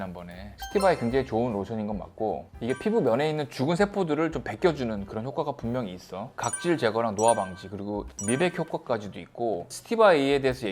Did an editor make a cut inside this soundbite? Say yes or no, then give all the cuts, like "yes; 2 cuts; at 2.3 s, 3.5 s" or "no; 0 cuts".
no; 0 cuts